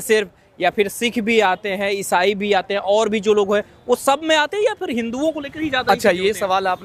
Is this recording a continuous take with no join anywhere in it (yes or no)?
yes